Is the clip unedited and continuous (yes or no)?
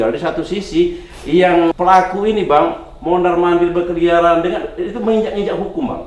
no